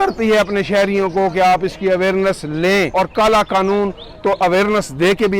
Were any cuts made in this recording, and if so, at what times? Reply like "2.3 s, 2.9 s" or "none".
2.9 s

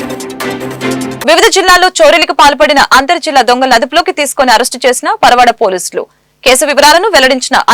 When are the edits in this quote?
1.2 s

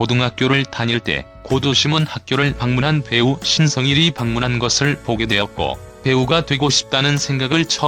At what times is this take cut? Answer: none

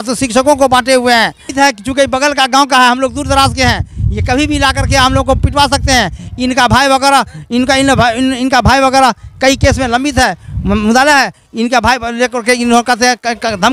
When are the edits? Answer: 1.5 s

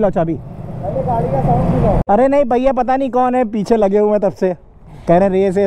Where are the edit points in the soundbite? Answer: 2.0 s

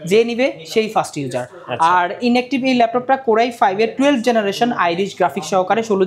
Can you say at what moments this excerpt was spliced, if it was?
none

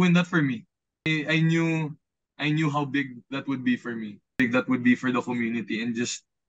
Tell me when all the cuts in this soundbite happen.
1.1 s, 4.4 s

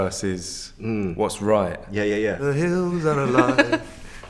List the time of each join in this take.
2.4 s

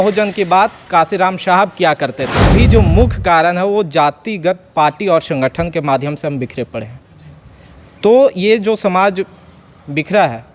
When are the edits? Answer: 2.5 s

